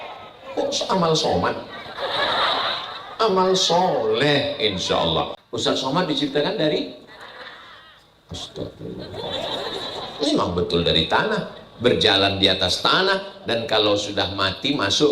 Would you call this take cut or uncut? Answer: cut